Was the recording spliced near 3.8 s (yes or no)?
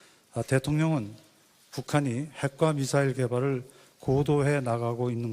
no